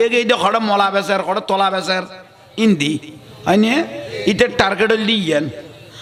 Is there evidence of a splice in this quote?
no; 0 cuts

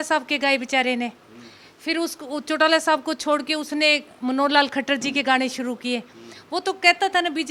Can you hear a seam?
no; 0 cuts

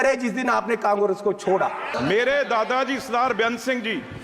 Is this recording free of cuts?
no; 1 cut; at 1.9 s

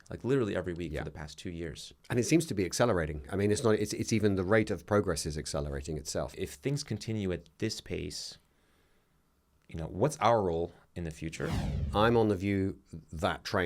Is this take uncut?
no; 2 cuts; at 6.3 s, 11.7 s

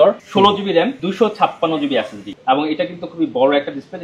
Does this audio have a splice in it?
yes; 2 cuts; at 1.0 s, 2.3 s

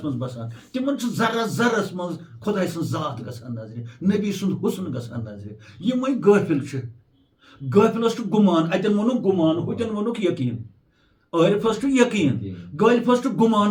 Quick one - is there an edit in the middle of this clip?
no; 0 cuts

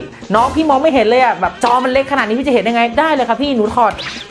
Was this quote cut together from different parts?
no; 0 cuts

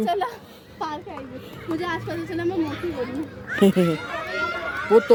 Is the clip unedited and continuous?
yes; 0 cuts

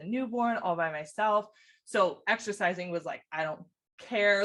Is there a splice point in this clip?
no; 0 cuts

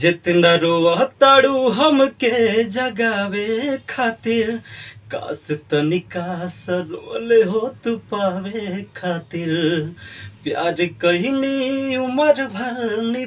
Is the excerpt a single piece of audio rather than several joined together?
yes; 0 cuts

